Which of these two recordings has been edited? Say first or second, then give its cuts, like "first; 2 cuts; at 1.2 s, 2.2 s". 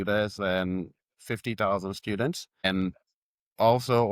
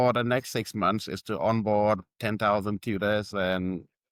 first; 1 cut; at 2.5 s